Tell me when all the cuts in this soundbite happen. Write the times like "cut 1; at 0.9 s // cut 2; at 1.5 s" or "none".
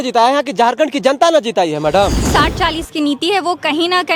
cut 1; at 2.2 s